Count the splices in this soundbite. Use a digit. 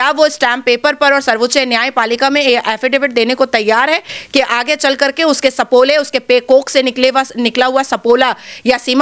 0